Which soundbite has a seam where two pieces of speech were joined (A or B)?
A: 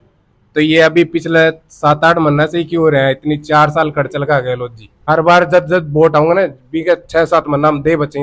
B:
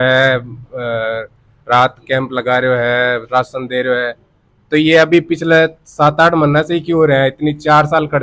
A